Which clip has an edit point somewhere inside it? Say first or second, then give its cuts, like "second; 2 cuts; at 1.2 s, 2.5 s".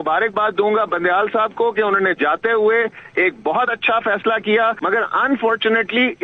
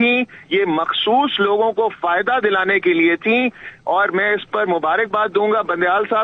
first; 1 cut; at 4.8 s